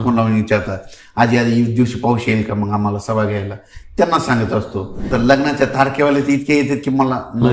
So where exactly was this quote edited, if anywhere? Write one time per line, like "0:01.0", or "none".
0:05.1